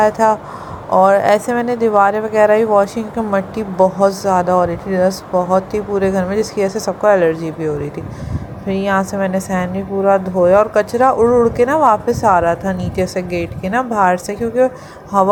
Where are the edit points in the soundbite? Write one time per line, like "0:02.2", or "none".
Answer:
none